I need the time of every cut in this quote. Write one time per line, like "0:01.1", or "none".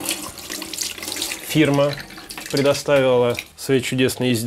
0:03.5